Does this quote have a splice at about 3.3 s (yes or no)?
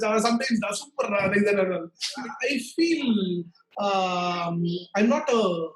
no